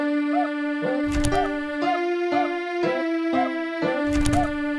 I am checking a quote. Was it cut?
yes; 2 cuts; at 2.7 s, 3.8 s

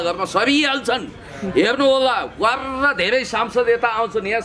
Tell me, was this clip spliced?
no; 0 cuts

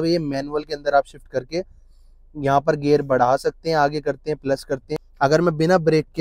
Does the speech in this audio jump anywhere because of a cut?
yes; 1 cut; at 5.0 s

